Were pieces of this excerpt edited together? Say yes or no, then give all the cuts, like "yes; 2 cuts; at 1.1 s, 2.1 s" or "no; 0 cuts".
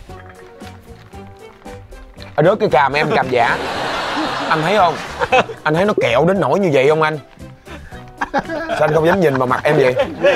no; 0 cuts